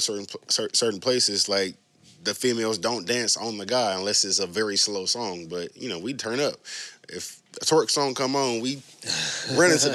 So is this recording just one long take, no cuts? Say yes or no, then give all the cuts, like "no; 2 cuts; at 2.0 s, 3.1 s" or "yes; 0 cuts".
yes; 0 cuts